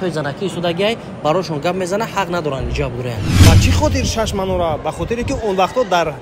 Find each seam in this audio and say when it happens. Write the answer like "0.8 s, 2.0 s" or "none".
3.3 s